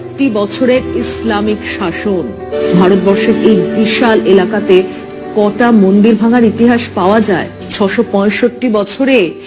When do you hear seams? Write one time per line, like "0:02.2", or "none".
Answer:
0:02.5
0:07.6